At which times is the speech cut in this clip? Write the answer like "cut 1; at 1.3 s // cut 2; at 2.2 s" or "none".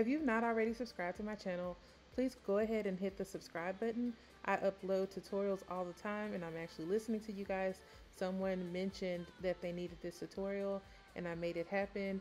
cut 1; at 2.3 s